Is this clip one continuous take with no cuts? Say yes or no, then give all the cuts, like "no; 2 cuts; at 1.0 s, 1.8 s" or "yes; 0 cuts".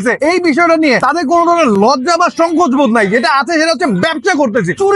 yes; 0 cuts